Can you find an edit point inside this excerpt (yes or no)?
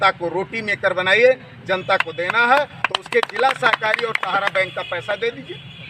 no